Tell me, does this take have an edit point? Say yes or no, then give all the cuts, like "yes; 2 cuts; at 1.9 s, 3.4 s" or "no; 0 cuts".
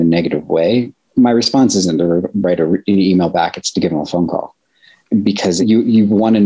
yes; 2 cuts; at 1.1 s, 5.1 s